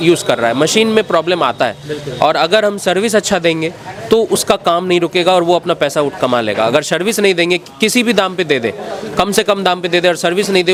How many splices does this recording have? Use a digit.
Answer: 0